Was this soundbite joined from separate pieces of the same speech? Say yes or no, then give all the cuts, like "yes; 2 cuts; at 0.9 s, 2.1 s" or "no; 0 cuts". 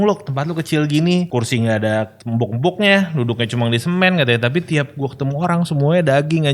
yes; 2 cuts; at 1.3 s, 2.2 s